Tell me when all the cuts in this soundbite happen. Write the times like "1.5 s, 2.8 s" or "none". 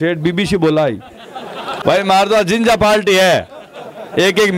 1.8 s